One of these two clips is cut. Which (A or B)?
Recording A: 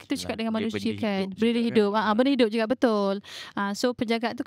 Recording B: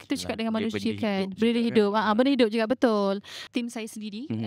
B